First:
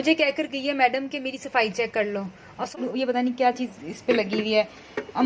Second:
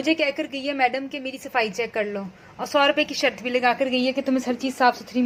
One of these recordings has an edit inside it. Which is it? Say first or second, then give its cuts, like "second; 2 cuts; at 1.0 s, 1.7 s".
first; 1 cut; at 2.8 s